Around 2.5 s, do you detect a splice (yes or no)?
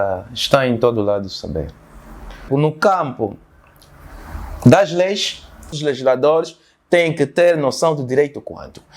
yes